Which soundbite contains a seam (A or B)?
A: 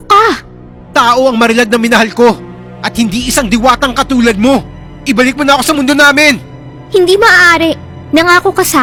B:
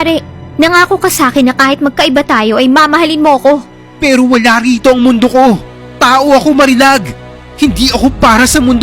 B